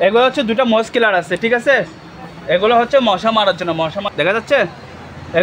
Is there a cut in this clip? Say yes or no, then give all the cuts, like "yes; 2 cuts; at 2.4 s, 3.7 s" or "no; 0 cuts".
yes; 1 cut; at 4.1 s